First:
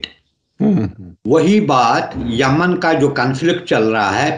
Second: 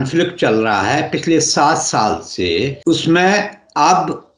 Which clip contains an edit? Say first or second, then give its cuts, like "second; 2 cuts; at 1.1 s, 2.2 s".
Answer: second; 1 cut; at 2.8 s